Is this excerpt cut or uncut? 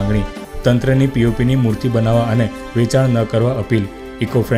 uncut